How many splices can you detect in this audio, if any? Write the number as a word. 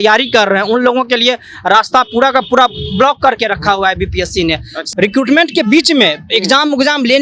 one